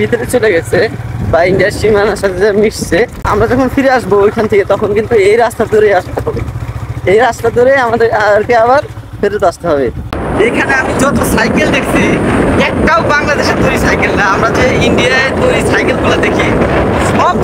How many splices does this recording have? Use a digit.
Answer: 2